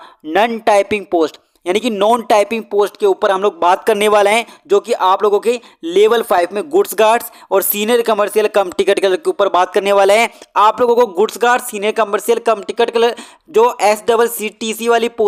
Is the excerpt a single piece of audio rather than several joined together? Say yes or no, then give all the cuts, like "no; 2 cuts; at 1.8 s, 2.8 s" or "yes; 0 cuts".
yes; 0 cuts